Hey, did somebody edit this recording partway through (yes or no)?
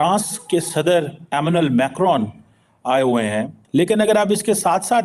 yes